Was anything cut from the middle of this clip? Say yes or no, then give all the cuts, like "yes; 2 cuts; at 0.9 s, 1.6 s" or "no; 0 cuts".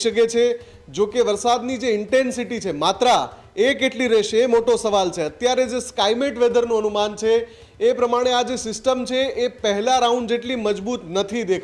no; 0 cuts